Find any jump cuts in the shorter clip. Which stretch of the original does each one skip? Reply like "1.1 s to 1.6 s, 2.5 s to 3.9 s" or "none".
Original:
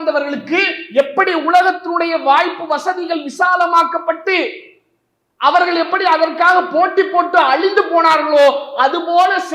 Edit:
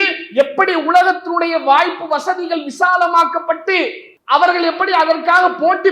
4.7 s to 5.2 s